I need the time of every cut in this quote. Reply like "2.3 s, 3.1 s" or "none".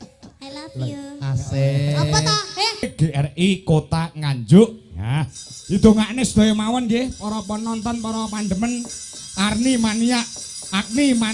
2.9 s